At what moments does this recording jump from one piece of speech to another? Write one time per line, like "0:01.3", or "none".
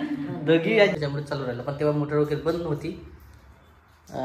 0:01.0